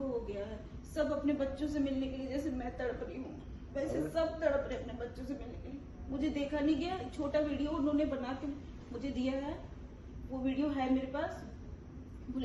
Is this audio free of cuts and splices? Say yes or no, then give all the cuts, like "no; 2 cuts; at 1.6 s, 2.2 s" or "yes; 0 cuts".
yes; 0 cuts